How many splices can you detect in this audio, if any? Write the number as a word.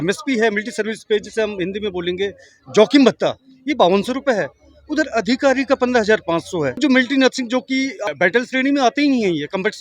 two